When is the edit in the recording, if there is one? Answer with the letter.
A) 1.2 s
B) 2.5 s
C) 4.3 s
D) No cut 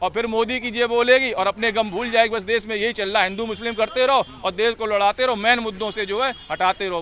D